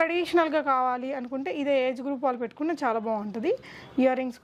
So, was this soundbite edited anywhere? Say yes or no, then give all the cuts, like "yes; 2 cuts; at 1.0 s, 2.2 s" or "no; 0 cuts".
no; 0 cuts